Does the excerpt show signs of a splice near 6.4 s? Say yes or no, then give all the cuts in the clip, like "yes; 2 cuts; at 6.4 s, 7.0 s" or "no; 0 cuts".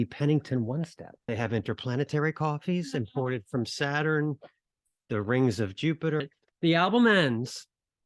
yes; 2 cuts; at 1.2 s, 6.4 s